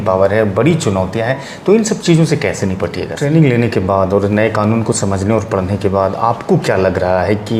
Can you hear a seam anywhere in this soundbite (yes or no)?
yes